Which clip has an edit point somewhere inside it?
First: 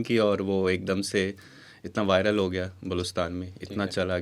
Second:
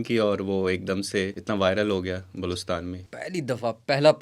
second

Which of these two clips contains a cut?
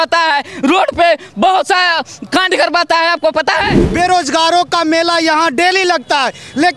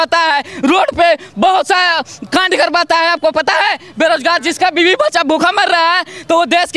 first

